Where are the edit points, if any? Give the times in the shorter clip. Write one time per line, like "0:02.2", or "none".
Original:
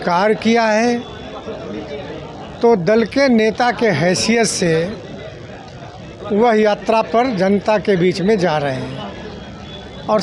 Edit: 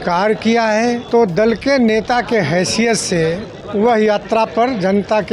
0:01.0
0:03.5